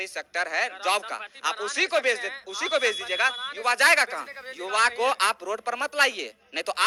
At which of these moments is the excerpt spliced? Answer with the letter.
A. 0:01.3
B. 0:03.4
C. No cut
C